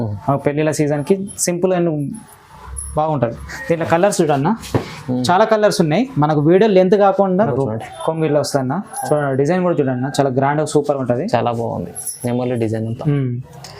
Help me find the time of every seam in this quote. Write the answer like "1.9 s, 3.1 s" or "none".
7.5 s